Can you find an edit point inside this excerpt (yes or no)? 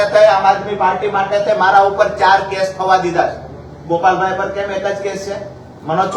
no